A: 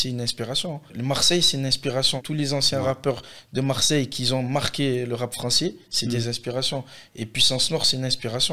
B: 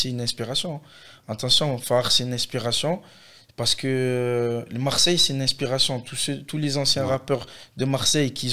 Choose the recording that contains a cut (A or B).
A